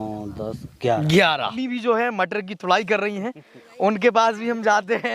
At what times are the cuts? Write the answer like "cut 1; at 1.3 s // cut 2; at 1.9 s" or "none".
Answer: cut 1; at 1.6 s